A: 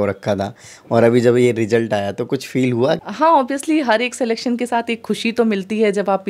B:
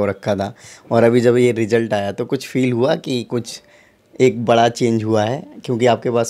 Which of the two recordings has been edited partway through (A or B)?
A